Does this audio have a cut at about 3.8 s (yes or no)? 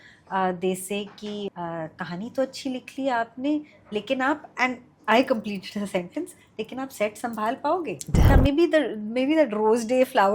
no